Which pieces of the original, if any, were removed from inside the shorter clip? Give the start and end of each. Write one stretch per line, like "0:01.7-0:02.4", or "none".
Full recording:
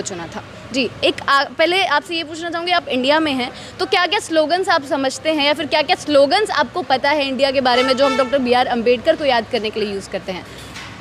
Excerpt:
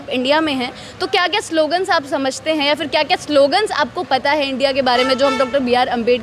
none